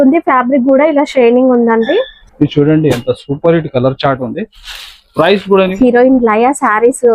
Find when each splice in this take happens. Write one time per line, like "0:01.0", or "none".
0:02.2
0:05.7